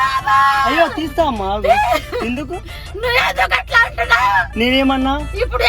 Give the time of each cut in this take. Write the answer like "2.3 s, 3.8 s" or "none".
1.0 s